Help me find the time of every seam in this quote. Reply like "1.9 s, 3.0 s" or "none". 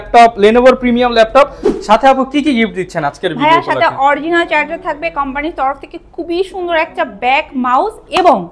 1.6 s